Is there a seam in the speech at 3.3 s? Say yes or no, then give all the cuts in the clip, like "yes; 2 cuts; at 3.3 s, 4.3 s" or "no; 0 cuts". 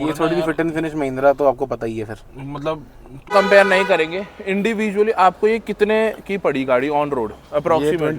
yes; 1 cut; at 3.3 s